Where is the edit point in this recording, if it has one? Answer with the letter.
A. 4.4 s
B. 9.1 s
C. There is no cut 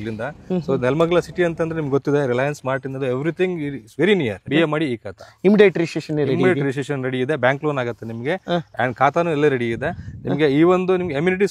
A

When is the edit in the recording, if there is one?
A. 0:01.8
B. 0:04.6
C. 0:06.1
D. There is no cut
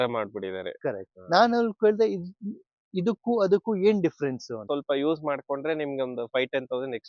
B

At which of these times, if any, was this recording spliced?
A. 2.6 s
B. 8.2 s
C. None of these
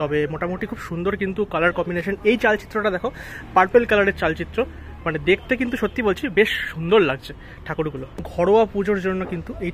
B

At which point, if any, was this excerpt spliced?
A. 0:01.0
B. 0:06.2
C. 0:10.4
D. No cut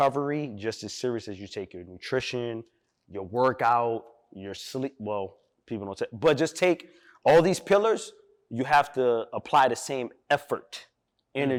D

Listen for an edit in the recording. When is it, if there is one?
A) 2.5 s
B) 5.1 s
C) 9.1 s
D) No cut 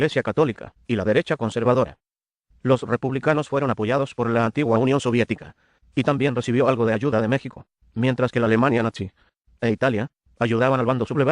B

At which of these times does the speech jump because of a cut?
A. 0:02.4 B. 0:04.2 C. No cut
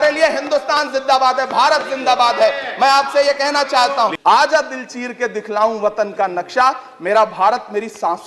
B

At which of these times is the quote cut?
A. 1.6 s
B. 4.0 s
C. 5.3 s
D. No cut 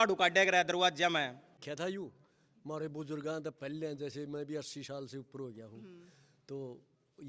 A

